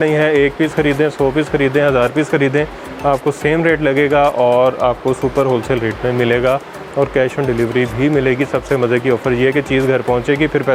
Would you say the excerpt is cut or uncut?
uncut